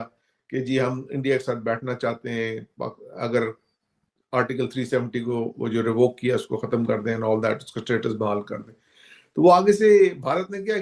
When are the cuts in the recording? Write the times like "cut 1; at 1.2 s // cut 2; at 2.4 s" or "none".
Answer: none